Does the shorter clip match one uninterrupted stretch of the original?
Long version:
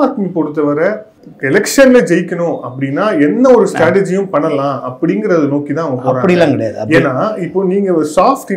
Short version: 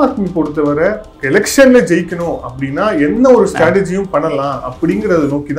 no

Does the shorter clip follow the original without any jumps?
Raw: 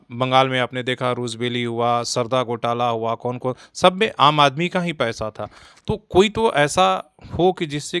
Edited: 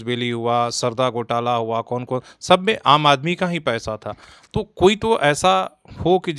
yes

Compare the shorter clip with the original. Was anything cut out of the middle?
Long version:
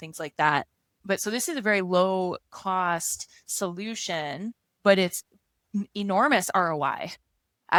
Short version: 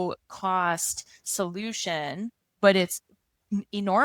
no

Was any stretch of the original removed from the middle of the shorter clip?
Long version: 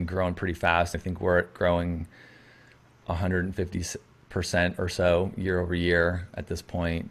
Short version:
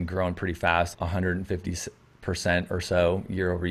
yes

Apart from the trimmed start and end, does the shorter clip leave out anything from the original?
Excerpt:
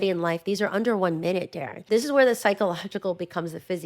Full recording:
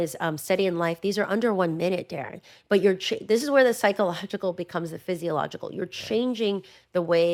yes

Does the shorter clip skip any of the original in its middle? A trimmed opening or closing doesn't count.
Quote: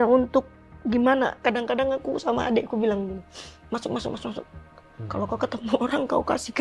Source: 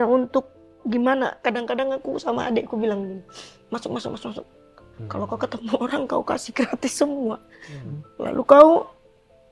no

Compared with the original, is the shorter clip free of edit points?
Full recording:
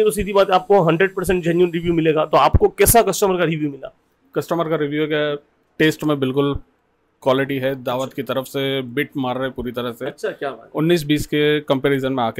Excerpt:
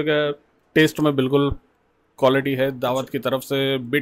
yes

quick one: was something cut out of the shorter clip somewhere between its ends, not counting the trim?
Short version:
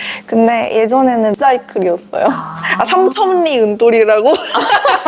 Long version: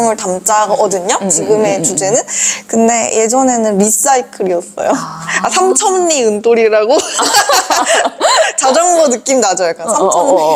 yes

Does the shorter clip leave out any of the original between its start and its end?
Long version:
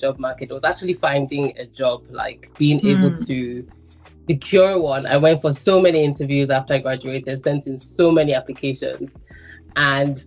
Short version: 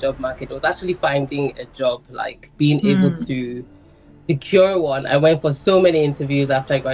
no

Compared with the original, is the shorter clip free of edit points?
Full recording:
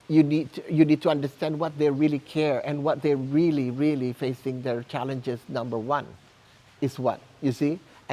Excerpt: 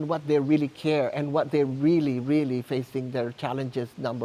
yes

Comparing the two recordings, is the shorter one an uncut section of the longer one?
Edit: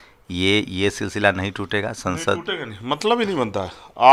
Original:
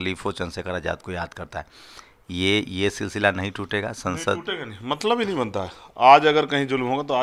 yes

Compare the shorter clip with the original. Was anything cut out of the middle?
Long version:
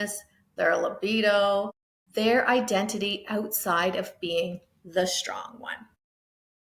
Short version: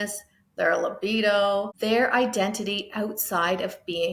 yes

